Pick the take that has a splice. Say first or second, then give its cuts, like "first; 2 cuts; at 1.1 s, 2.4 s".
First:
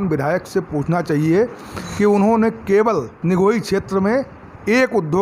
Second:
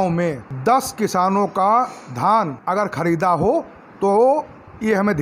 first; 1 cut; at 3.1 s